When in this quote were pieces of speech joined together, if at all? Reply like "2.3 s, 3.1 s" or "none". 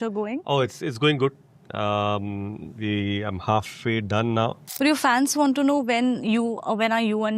4.6 s